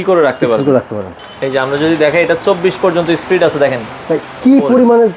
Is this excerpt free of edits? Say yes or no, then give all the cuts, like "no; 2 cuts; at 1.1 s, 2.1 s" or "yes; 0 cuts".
no; 1 cut; at 1.1 s